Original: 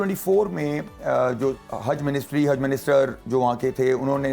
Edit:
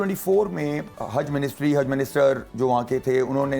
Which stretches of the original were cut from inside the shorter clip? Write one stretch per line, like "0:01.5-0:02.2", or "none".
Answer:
0:00.9-0:01.6

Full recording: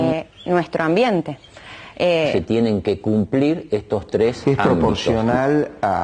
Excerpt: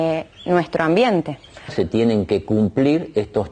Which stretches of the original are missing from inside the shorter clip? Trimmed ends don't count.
0:01.8-0:02.3

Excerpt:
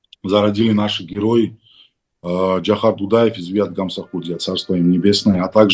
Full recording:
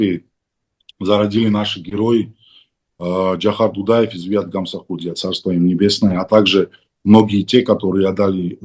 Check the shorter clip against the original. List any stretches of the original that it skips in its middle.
none

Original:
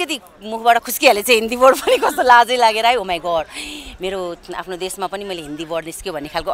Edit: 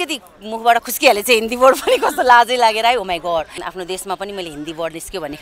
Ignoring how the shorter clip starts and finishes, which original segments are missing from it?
0:03.5-0:04.5

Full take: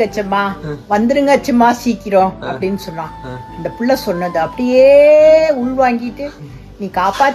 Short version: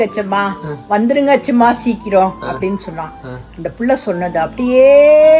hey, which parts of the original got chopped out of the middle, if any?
none

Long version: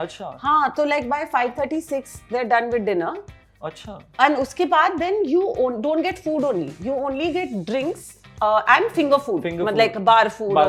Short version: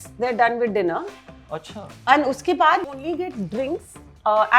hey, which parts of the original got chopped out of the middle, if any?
0:05.0-0:07.0

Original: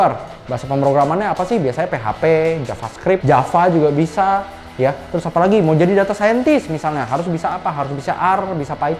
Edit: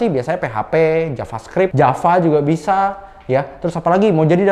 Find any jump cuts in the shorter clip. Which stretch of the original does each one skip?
none

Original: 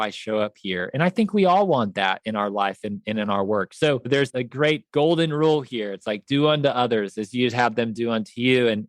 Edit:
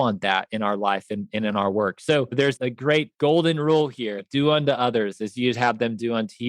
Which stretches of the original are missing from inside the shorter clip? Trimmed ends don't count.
0:05.9-0:06.2

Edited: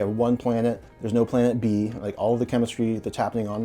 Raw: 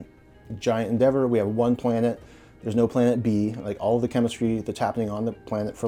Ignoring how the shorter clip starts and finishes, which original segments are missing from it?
0:02.3-0:02.5

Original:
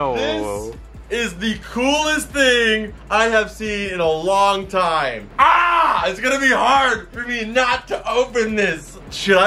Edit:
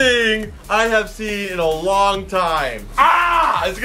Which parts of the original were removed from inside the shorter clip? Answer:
none

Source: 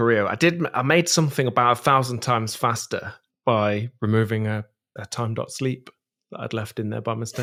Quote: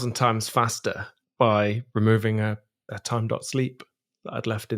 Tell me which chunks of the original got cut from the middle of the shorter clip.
none

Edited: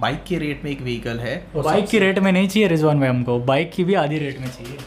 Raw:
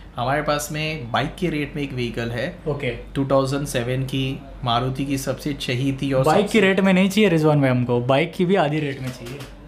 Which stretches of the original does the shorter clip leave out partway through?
0:02.7-0:06.2

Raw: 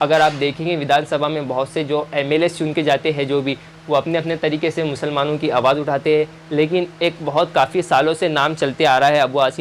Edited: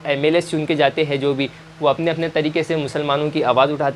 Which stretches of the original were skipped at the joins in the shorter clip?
none

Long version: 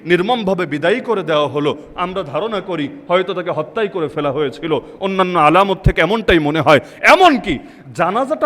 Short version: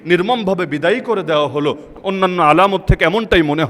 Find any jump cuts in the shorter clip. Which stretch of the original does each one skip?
0:01.9-0:04.9

